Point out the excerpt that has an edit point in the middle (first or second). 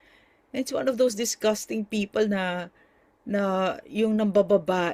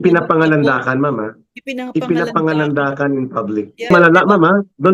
second